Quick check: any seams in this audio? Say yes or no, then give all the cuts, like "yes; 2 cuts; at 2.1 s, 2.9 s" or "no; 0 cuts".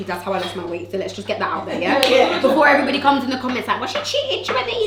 no; 0 cuts